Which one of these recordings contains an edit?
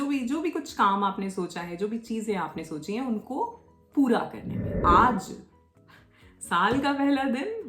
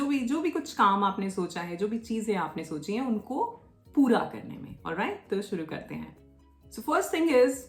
first; 1 cut; at 4.8 s

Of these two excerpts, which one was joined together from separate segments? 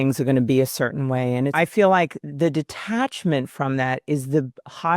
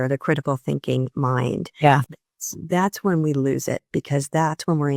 first; 2 cuts; at 1.5 s, 2.2 s

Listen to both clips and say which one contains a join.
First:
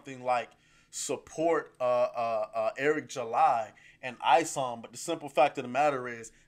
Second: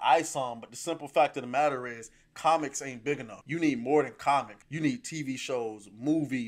second; 2 cuts; at 3.3 s, 4.6 s

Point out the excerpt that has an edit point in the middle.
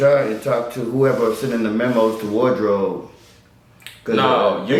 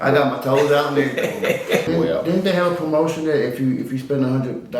second; 1 cut; at 1.9 s

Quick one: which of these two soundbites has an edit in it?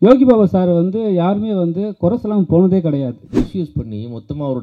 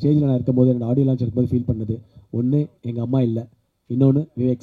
first; 1 cut; at 3.4 s

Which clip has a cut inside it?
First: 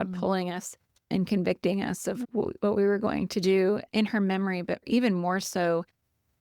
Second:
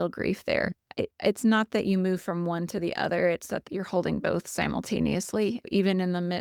first; 1 cut; at 4.8 s

